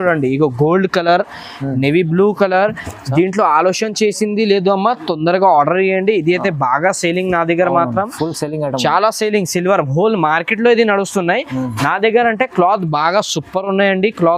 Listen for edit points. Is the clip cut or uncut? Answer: uncut